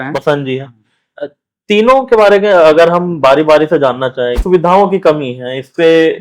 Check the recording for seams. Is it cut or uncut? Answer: cut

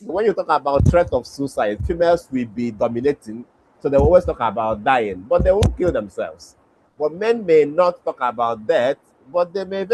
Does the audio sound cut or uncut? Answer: uncut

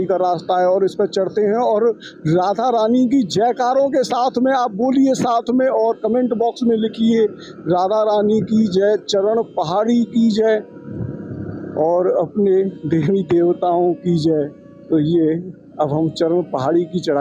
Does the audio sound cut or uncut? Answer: uncut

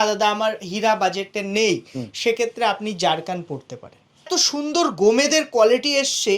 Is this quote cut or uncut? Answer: cut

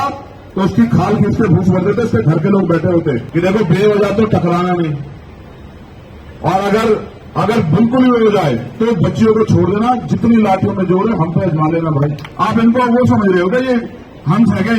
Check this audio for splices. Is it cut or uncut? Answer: cut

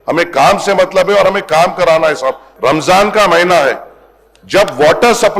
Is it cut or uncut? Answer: cut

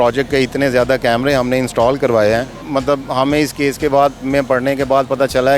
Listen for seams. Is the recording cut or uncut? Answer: cut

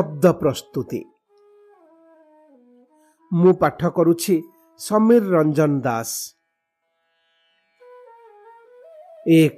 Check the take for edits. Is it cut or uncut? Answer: cut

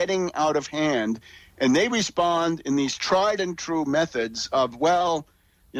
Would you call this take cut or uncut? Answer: uncut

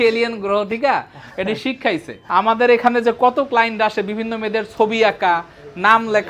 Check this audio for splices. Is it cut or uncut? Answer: cut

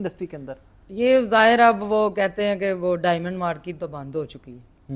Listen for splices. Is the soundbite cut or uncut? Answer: uncut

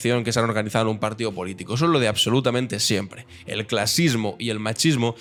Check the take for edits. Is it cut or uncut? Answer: uncut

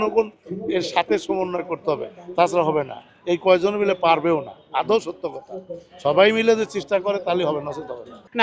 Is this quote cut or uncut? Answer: uncut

